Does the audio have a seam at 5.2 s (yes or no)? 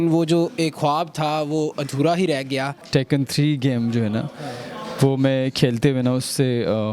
no